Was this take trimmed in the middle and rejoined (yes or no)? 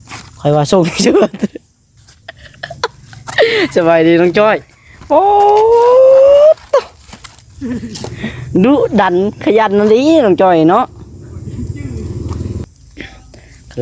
yes